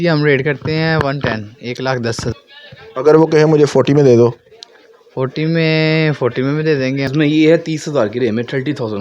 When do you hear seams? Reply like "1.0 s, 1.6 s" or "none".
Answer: 2.3 s, 7.1 s